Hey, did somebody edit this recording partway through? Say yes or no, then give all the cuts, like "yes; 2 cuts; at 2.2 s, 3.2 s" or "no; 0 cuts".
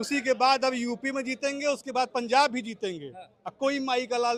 no; 0 cuts